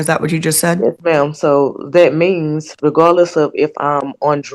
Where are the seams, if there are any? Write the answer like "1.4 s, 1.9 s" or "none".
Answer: none